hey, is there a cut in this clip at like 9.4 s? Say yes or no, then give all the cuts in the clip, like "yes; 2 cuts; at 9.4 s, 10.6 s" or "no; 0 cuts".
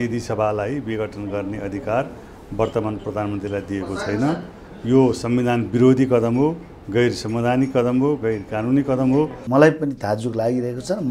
yes; 1 cut; at 9.4 s